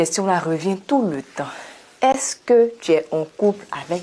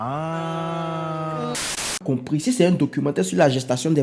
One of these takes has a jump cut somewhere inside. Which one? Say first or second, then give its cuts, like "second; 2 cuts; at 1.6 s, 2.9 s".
second; 1 cut; at 2.0 s